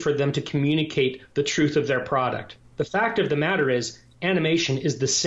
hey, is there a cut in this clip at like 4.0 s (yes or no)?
no